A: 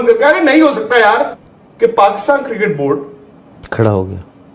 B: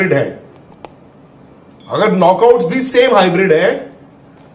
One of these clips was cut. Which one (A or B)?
A